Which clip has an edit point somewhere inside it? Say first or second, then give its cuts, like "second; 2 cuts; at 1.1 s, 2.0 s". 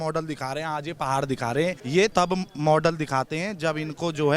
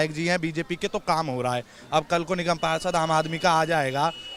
first; 1 cut; at 2.0 s